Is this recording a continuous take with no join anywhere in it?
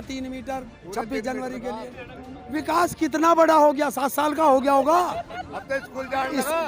no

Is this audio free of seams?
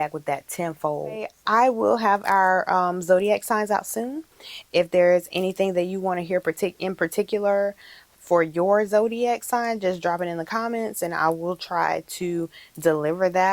no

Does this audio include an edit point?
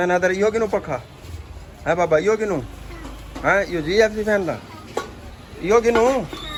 no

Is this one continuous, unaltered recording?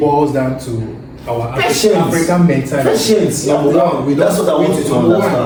yes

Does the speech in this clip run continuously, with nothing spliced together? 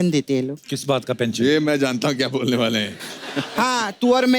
yes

